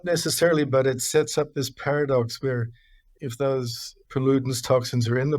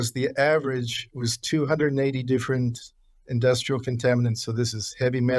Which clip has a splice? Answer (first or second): first